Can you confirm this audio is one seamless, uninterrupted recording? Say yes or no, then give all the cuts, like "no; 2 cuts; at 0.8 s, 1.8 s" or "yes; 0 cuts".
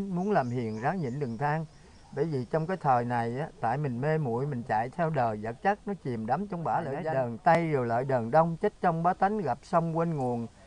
no; 1 cut; at 7.6 s